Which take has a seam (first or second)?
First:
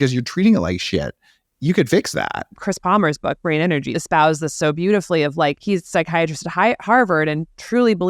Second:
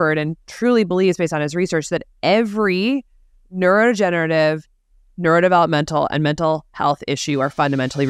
first